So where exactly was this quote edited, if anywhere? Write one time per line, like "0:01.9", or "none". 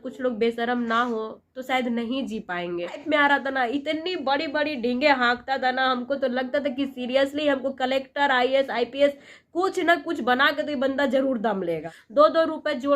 0:03.0
0:11.9